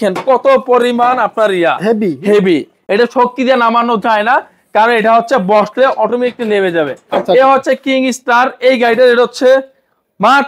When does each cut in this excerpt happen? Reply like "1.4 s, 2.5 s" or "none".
none